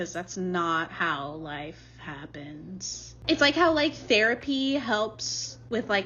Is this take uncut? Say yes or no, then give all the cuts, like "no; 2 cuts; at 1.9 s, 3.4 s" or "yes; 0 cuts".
no; 1 cut; at 3.1 s